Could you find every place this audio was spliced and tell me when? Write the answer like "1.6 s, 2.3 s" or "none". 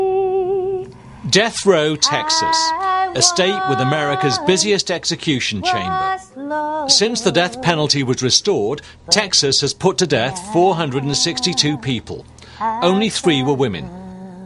7.6 s